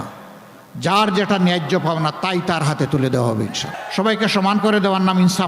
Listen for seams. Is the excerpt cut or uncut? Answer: cut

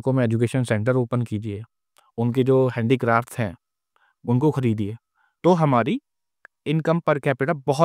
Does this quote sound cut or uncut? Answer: cut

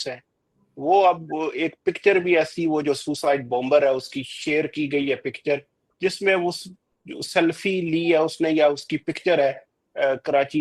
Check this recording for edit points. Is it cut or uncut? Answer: uncut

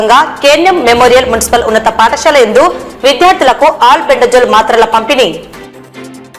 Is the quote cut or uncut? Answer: uncut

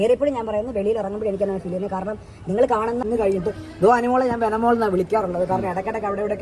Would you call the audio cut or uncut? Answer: cut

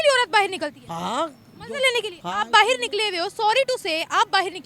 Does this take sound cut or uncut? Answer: uncut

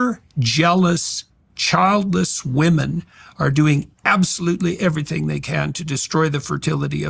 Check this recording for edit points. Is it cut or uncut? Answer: uncut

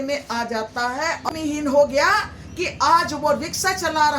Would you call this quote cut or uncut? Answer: cut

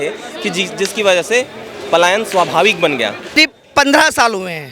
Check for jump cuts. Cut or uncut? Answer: cut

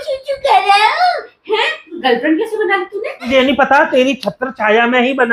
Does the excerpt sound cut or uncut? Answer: cut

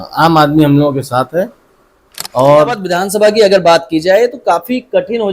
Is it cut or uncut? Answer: cut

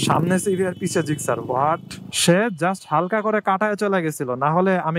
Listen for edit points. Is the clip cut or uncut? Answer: cut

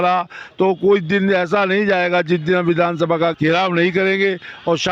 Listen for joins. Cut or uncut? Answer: cut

